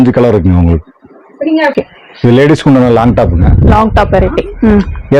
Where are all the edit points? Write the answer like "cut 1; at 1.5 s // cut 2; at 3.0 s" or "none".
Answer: cut 1; at 1.7 s